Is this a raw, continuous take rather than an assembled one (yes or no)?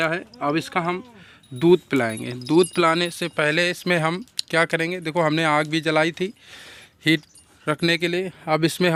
yes